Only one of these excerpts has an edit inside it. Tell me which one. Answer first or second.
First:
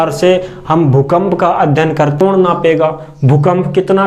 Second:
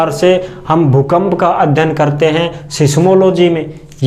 first